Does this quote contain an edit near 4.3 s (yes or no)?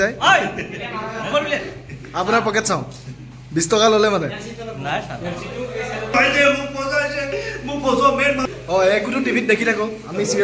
no